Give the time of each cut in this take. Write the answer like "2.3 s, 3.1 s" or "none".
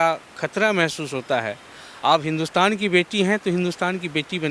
none